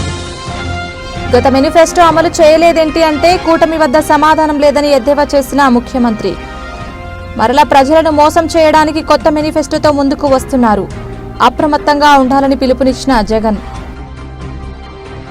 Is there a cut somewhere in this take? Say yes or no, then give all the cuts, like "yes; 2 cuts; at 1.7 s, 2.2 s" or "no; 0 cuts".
no; 0 cuts